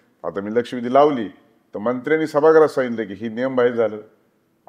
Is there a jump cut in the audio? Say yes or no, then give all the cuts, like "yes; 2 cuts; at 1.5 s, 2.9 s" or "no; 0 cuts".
no; 0 cuts